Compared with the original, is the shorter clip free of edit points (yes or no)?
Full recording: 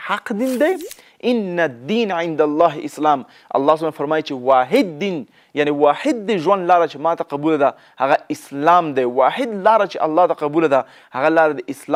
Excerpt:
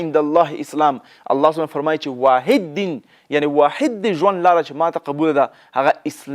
yes